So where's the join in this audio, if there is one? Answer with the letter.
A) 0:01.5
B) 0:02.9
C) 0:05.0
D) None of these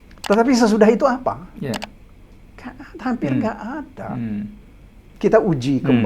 C